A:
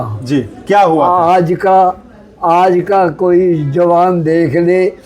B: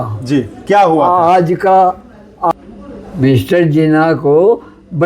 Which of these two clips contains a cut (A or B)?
B